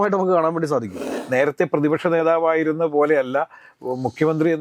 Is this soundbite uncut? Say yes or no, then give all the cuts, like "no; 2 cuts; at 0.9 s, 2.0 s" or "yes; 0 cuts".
no; 1 cut; at 1.0 s